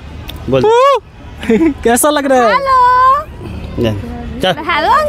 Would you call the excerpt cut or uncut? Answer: uncut